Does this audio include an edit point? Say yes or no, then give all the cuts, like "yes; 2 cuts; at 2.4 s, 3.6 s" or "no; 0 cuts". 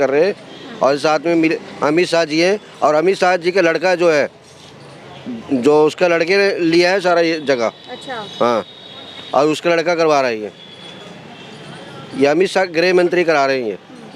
no; 0 cuts